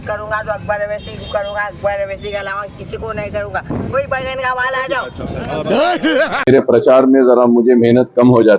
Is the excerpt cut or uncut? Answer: cut